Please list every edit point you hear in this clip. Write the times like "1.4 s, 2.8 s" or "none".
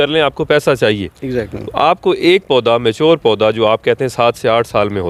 none